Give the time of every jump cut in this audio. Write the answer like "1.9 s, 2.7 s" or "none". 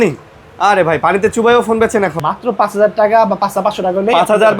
2.2 s